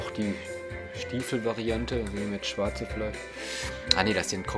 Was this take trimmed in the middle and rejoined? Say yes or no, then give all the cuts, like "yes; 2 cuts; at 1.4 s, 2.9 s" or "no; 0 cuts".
no; 0 cuts